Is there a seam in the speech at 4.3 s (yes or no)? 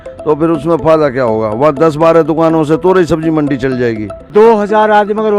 yes